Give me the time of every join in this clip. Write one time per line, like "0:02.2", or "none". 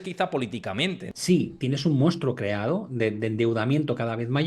0:01.0